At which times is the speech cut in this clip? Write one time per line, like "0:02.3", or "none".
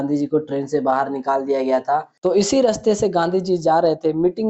0:02.1